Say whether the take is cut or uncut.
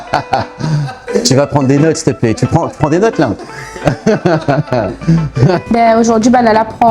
cut